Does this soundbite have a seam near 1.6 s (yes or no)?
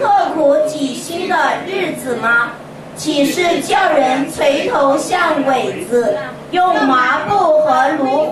no